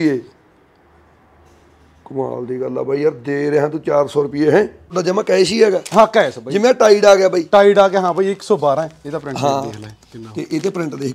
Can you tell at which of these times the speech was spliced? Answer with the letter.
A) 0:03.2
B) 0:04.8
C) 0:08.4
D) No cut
B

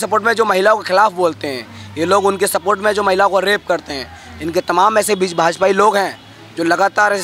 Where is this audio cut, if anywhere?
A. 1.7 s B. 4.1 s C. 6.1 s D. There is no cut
D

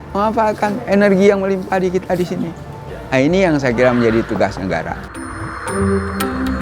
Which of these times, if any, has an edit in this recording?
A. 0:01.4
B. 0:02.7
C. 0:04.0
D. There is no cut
D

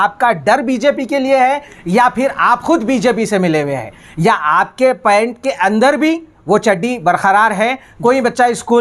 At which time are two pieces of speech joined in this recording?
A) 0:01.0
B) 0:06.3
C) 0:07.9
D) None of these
C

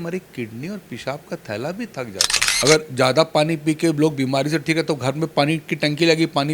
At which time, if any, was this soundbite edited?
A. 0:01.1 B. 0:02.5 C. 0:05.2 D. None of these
B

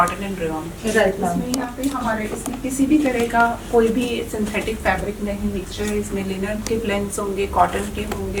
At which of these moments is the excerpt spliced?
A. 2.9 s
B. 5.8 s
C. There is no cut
C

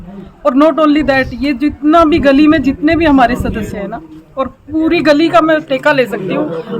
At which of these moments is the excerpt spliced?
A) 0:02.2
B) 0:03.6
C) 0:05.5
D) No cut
D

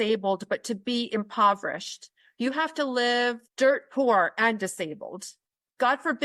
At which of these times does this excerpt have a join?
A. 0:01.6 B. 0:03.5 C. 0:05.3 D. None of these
B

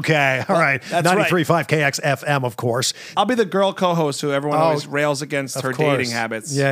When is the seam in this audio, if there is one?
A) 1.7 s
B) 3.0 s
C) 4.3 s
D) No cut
B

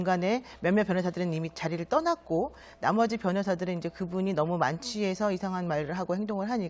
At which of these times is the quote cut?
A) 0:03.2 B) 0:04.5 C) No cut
A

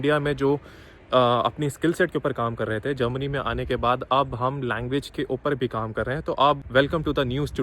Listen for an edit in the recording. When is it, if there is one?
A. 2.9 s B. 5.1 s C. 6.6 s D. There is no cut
C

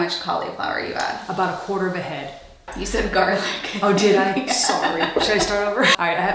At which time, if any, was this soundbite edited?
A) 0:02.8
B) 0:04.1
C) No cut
A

